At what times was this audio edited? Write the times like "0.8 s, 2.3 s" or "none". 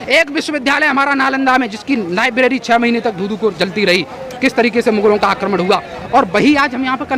none